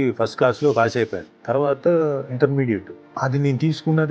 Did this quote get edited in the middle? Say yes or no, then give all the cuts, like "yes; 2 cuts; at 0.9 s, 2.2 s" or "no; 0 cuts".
yes; 2 cuts; at 1.2 s, 2.9 s